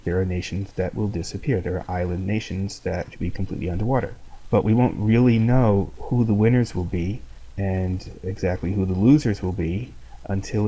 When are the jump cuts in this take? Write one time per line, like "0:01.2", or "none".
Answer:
none